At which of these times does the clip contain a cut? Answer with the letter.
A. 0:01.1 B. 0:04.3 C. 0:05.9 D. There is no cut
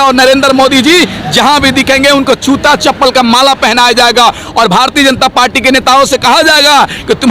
D